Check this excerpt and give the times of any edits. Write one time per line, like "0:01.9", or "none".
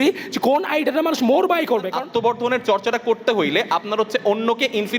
0:01.9